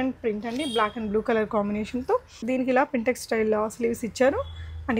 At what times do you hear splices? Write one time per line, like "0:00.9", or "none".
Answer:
0:02.4